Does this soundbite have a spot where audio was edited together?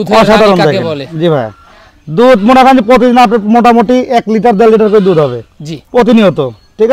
no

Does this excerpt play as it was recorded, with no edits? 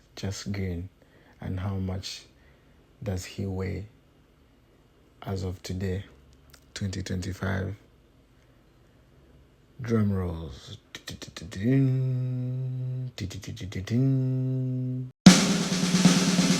no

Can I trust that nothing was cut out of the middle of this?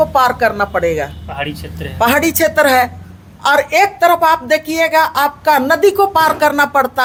yes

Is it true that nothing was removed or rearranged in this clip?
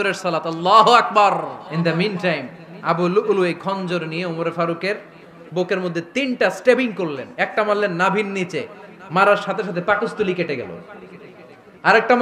no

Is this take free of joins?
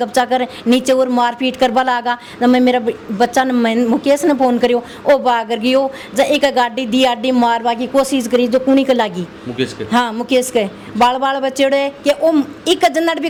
yes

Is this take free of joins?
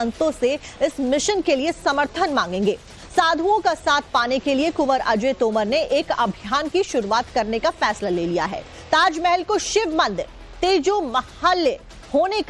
no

